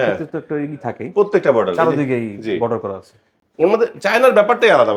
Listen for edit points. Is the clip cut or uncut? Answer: uncut